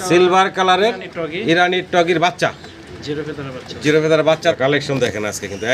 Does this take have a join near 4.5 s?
yes; 1 cut; at 4.5 s

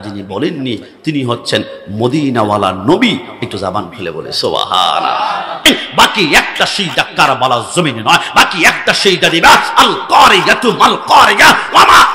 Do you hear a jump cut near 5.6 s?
yes; 1 cut; at 5.6 s

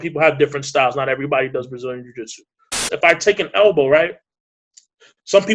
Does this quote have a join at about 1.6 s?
no; 1 cut; at 2.8 s

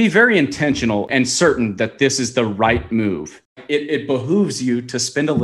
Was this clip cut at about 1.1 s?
yes; 2 cuts; at 1.1 s, 3.5 s

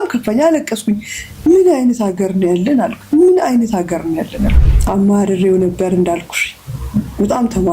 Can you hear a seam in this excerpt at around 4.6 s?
yes; 1 cut; at 4.6 s

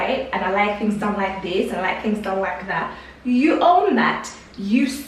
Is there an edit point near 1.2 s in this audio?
no; 0 cuts

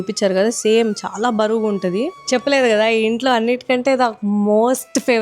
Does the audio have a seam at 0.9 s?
no; 1 cut; at 2.2 s

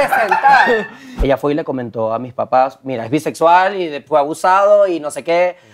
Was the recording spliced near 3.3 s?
no; 1 cut; at 1.0 s

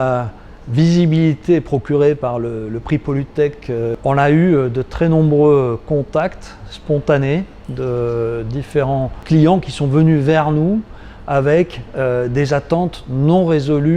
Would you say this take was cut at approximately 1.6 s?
no; 1 cut; at 4.0 s

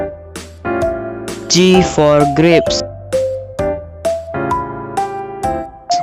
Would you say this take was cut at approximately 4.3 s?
yes; 3 cuts; at 1.6 s, 2.7 s, 4.3 s

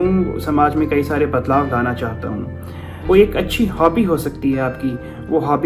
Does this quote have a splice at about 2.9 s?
yes; 1 cut; at 2.9 s

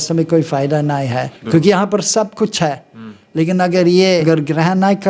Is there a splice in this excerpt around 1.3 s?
yes; 2 cuts; at 1.3 s, 4.2 s

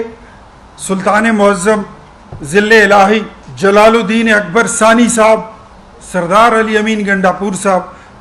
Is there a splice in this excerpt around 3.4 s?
yes; 1 cut; at 3.4 s

